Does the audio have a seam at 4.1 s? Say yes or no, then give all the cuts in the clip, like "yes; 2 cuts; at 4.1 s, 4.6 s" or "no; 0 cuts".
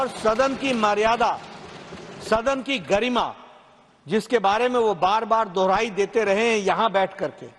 no; 0 cuts